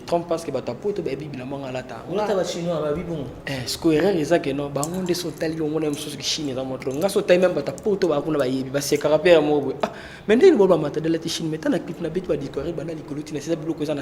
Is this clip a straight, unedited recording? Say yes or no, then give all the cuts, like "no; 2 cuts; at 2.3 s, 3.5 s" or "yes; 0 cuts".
yes; 0 cuts